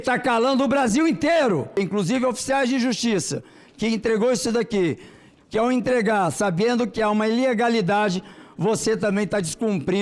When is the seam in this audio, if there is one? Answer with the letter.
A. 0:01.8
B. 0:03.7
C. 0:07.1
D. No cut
A